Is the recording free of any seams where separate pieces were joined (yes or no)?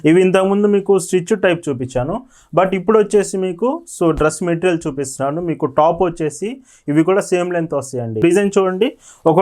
no